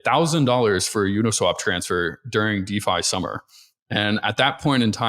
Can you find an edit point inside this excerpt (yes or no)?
no